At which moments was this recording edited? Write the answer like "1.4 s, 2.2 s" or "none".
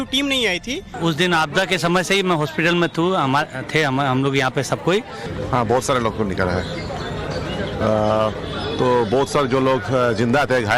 0.9 s, 3.6 s, 5.2 s